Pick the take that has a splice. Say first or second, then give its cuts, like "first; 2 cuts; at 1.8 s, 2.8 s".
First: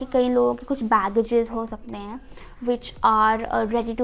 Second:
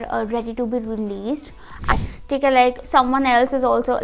second; 1 cut; at 1.9 s